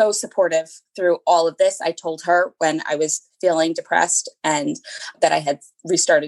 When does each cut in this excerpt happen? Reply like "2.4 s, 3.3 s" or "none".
none